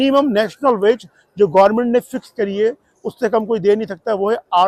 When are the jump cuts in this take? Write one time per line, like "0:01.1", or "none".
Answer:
none